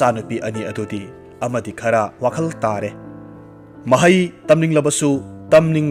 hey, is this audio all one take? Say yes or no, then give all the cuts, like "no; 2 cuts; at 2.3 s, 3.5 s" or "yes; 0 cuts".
yes; 0 cuts